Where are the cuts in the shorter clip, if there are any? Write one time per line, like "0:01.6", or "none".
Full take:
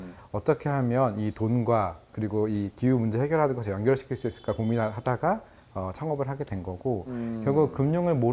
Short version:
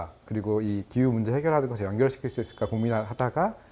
none